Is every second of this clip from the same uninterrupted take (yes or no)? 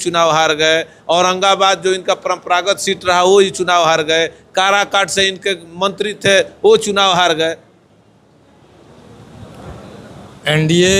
yes